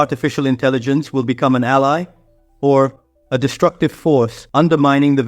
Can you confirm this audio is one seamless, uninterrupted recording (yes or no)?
yes